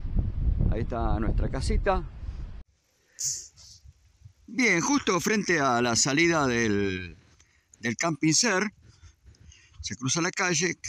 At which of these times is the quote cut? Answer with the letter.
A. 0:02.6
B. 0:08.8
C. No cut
A